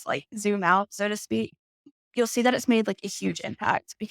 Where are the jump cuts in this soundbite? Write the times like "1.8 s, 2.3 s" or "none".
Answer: 1.9 s